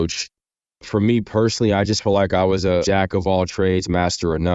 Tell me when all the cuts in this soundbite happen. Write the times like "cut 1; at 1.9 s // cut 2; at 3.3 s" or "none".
cut 1; at 2.8 s